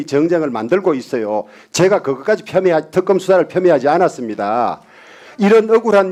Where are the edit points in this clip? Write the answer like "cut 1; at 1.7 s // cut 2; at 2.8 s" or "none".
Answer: none